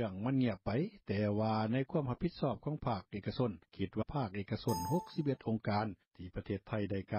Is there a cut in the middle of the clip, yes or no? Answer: no